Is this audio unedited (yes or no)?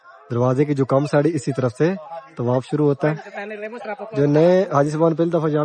yes